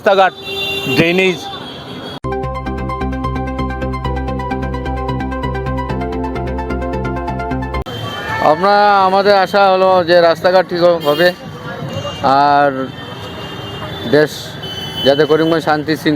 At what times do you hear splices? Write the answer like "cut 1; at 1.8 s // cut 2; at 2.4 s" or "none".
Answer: cut 1; at 2.3 s // cut 2; at 7.9 s